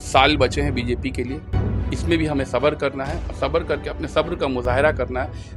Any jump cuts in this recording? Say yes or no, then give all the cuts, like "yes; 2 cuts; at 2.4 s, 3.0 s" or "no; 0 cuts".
no; 0 cuts